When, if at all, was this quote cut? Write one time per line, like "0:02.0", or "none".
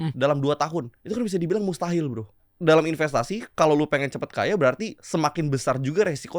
0:01.0
0:02.5
0:04.9